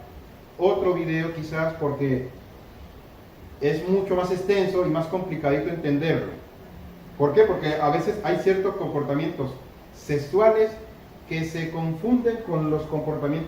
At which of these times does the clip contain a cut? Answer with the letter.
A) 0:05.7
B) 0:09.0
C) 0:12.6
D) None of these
A